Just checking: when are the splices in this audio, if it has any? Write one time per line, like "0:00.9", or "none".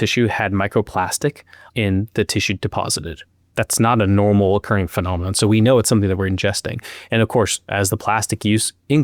none